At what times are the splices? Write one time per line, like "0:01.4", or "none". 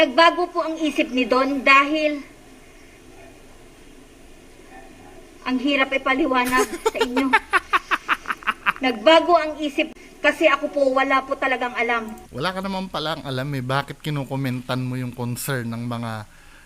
0:09.9